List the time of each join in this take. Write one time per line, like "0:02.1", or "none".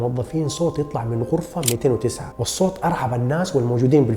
0:02.2